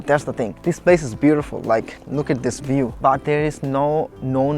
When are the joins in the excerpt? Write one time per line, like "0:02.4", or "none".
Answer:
0:02.9